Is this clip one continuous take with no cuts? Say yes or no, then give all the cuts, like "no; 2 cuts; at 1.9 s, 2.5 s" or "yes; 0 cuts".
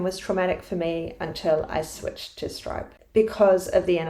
no; 1 cut; at 2.9 s